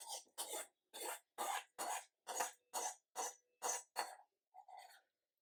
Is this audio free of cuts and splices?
yes; 0 cuts

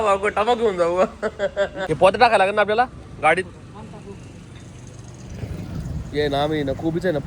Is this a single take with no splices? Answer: no; 1 cut; at 1.8 s

